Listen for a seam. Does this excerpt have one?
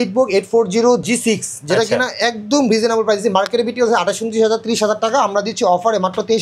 yes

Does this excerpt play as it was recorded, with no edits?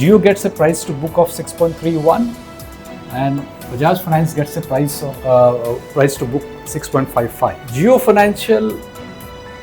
no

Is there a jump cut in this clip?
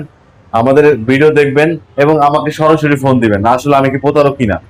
no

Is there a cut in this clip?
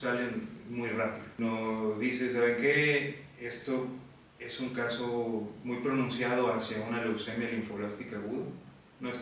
yes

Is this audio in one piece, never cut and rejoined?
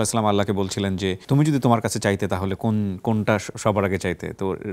no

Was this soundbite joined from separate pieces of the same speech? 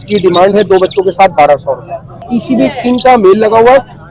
yes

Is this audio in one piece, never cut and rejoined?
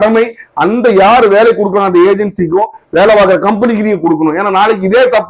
yes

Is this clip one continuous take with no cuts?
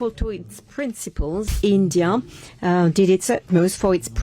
no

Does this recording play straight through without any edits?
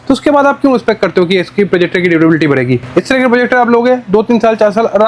yes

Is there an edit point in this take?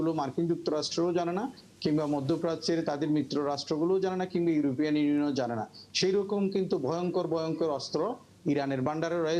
no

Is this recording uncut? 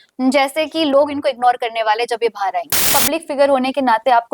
no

